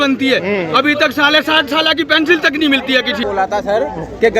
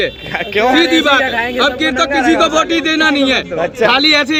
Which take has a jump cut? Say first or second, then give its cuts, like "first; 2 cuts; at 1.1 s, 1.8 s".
first; 1 cut; at 3.2 s